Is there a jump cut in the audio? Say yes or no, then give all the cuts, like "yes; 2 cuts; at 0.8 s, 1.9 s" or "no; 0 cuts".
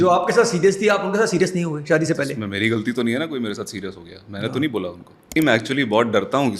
yes; 1 cut; at 5.3 s